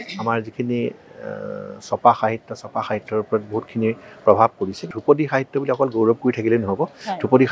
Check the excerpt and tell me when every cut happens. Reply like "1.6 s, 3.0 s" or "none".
4.9 s